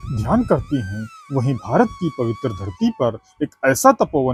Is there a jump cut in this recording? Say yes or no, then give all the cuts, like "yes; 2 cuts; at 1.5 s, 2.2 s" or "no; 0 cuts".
no; 0 cuts